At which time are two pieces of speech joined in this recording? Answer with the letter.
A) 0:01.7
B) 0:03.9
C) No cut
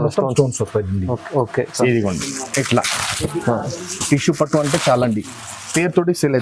A